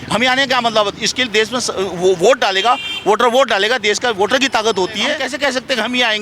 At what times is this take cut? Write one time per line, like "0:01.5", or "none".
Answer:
0:05.2

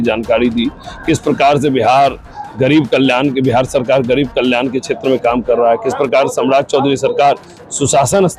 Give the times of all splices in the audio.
none

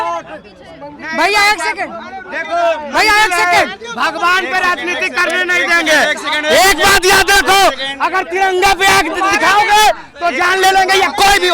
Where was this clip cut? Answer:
none

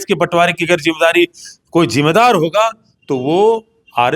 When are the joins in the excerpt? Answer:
0:01.5

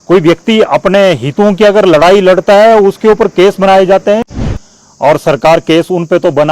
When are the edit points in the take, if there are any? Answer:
0:04.4

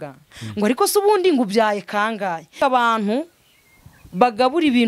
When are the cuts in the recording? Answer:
0:02.5

